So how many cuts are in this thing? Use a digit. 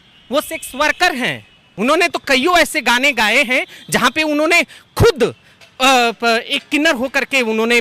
1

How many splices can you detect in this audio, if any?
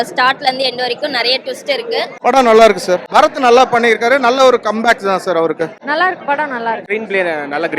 3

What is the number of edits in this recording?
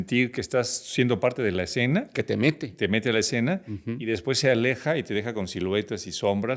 0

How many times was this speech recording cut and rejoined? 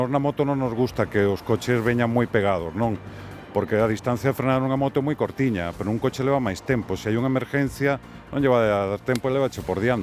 0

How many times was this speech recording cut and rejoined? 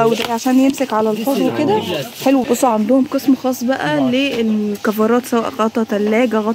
1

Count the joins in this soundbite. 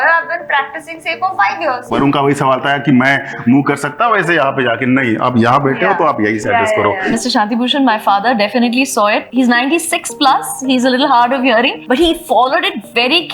4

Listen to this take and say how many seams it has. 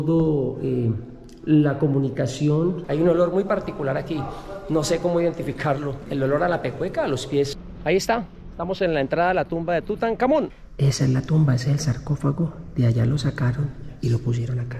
4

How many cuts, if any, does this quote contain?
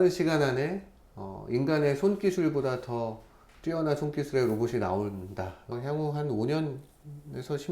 1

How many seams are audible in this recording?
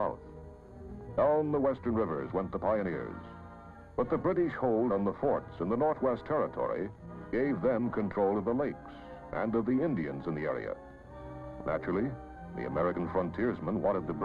1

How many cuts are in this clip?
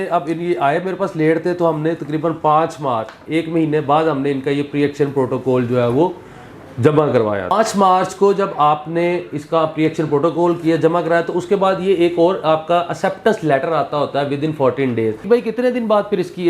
2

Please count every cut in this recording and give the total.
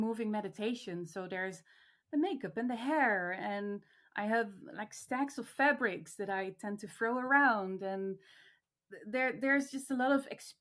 0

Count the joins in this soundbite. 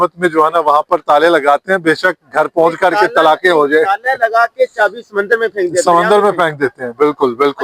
0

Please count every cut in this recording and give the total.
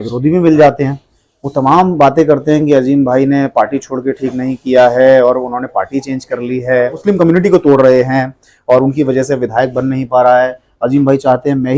1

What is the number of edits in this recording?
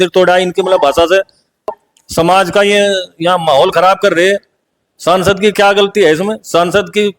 1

